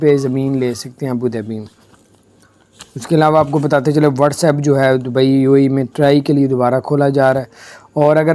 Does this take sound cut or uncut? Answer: uncut